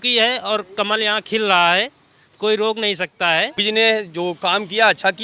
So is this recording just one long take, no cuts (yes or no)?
no